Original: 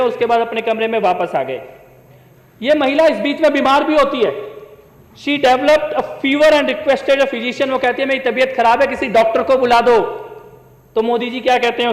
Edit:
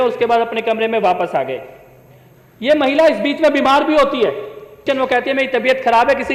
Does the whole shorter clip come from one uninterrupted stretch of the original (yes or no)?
no